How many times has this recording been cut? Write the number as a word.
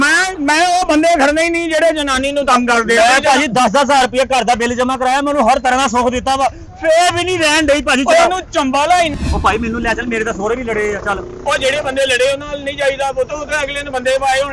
one